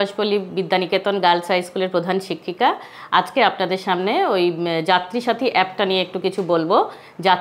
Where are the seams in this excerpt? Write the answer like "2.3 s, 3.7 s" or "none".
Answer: none

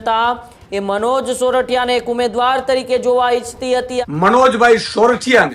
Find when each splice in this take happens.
3.9 s

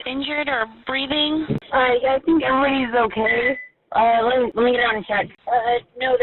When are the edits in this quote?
1.6 s, 4.5 s, 5.4 s

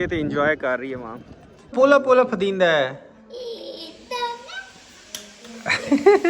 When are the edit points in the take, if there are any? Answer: 1.7 s

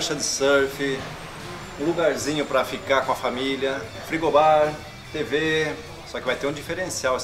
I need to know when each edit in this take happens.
4.0 s, 5.9 s

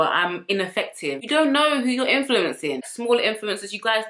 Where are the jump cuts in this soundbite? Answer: 1.2 s, 2.9 s

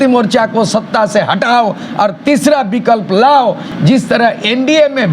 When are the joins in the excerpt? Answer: 3.7 s

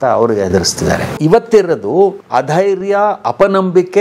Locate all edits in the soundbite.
1.2 s, 2.2 s

